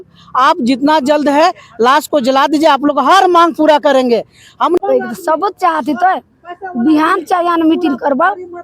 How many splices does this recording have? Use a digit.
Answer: 1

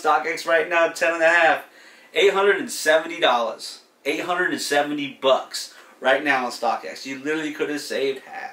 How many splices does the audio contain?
0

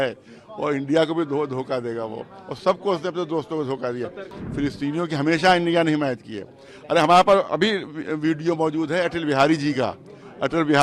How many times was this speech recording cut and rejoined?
1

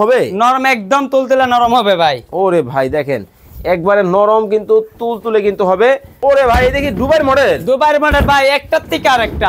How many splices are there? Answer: 1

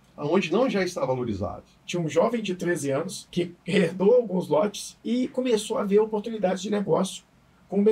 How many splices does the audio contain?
3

